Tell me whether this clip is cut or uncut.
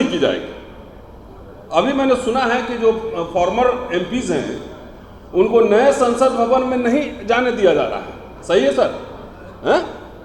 uncut